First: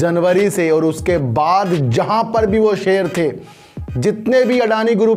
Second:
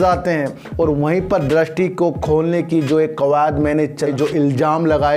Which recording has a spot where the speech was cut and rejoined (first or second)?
second